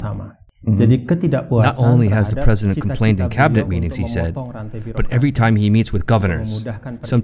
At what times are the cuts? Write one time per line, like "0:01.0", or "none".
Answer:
0:01.6